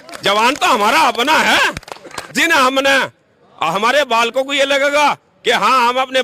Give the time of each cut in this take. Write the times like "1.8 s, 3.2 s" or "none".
2.3 s